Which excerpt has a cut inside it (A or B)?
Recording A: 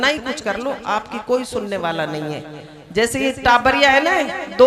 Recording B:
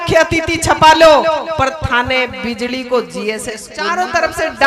B